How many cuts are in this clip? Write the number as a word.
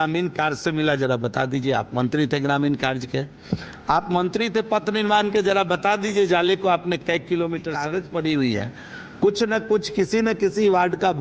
one